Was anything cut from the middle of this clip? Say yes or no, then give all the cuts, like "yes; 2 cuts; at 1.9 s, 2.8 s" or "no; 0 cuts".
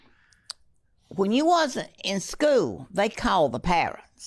no; 0 cuts